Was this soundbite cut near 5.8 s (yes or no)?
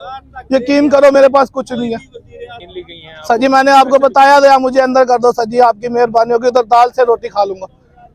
no